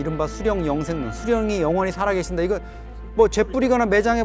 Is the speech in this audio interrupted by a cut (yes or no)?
no